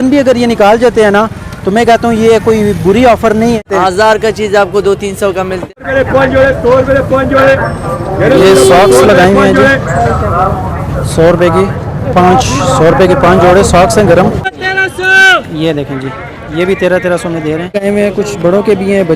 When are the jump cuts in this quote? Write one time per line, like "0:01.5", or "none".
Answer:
0:03.7
0:05.6
0:14.5
0:17.8